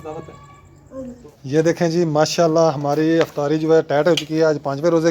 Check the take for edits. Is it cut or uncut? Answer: cut